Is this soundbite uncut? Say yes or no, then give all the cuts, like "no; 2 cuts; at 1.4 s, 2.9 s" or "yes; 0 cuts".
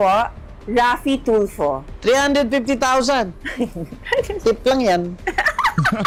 yes; 0 cuts